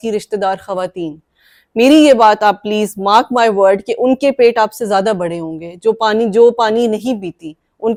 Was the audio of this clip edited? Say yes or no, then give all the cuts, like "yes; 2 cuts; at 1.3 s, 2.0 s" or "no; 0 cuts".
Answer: no; 0 cuts